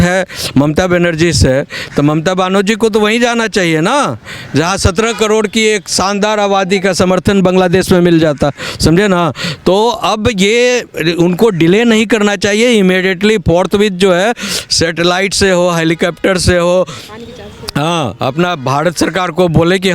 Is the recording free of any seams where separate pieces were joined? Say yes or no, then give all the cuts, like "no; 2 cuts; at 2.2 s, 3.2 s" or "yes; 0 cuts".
yes; 0 cuts